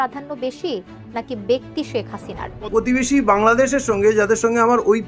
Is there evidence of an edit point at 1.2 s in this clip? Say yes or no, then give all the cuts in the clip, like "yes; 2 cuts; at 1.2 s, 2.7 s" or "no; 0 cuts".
no; 1 cut; at 2.7 s